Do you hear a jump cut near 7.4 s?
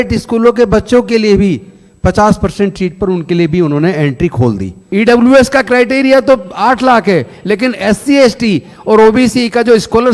no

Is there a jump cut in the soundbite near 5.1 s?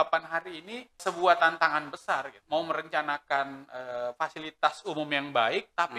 no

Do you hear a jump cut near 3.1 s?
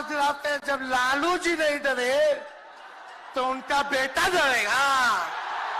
no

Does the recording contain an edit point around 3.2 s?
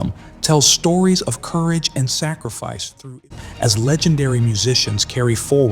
yes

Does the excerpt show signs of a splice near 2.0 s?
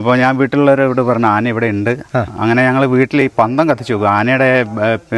no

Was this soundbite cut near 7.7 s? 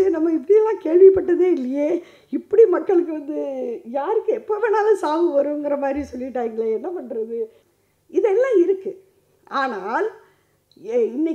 yes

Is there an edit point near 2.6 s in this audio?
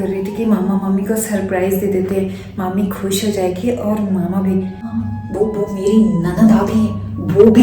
no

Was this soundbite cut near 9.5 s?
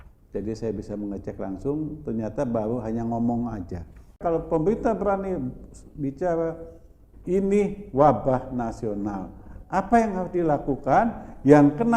no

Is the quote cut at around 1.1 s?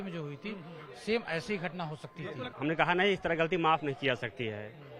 no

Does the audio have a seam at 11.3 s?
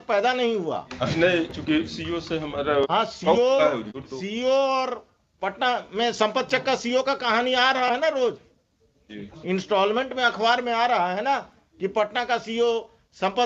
no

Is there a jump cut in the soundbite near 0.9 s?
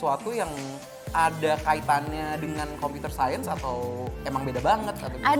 no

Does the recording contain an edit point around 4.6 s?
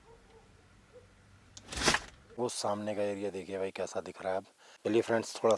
yes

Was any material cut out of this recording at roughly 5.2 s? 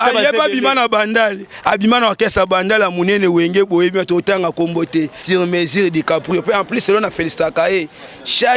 yes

